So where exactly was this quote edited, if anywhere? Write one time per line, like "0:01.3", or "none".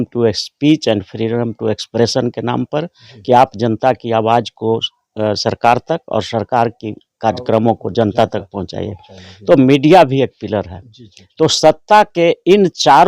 none